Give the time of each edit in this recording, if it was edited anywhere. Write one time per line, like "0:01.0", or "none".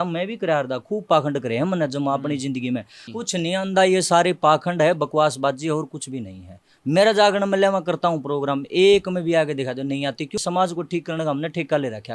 0:03.0
0:10.4